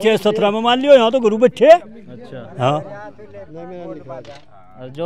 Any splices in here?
no; 0 cuts

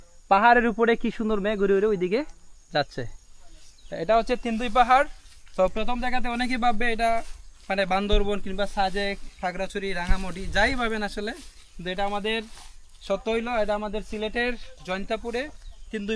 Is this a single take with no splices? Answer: yes; 0 cuts

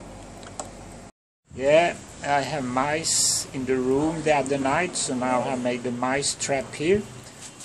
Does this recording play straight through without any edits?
no; 1 cut; at 1.1 s

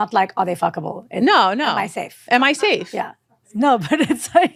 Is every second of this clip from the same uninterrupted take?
yes; 0 cuts

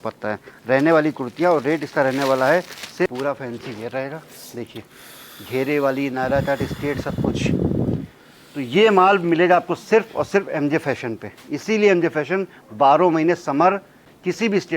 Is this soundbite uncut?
no; 1 cut; at 3.1 s

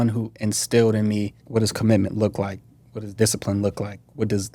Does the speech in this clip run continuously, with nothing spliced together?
yes; 0 cuts

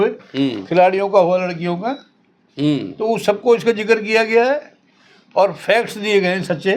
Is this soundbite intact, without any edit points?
yes; 0 cuts

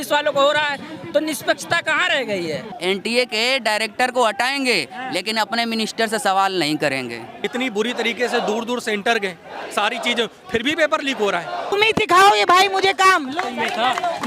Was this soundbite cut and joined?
yes; 3 cuts; at 2.7 s, 7.3 s, 11.7 s

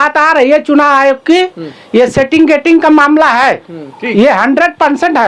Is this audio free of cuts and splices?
yes; 0 cuts

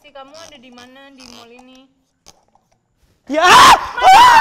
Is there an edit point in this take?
no; 0 cuts

